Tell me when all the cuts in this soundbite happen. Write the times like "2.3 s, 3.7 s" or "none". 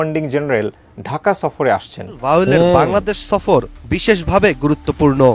2.2 s

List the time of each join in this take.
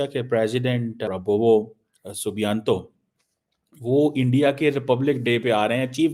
1.0 s

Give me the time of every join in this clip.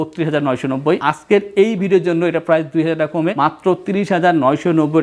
1.0 s, 3.3 s

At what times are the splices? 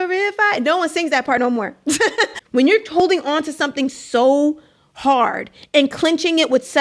2.4 s

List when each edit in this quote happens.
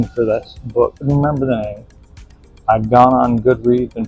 1.1 s

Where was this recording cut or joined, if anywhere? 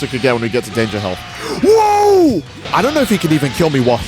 2.7 s

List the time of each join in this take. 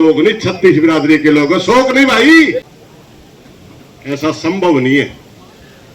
2.7 s

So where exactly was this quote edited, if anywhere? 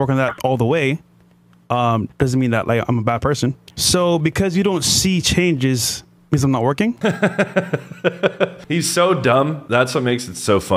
3.7 s, 7.0 s, 8.6 s

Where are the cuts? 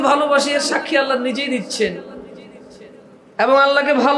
none

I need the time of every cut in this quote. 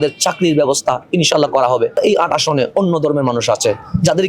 2.0 s

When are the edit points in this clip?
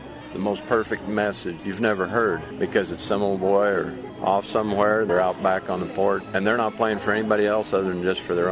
1.6 s, 2.5 s, 4.0 s, 5.1 s, 6.2 s

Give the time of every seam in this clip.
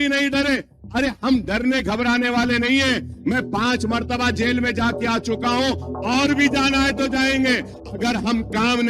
7.8 s

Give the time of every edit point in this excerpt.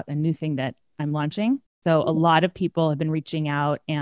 1.7 s

